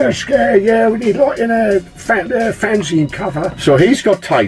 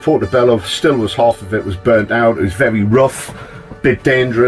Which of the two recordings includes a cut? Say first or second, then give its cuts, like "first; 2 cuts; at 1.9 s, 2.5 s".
first; 1 cut; at 3.5 s